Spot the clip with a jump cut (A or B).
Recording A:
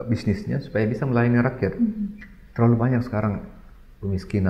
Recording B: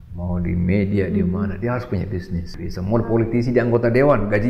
B